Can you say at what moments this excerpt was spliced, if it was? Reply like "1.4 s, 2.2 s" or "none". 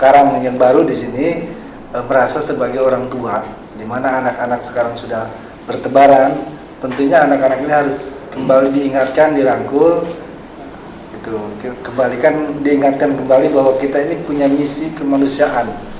none